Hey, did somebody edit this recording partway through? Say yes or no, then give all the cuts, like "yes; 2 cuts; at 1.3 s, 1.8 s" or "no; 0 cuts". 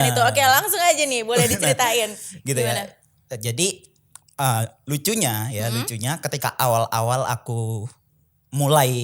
no; 0 cuts